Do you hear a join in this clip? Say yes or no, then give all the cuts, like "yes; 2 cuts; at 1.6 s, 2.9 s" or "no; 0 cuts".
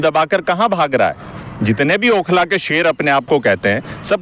yes; 1 cut; at 1.3 s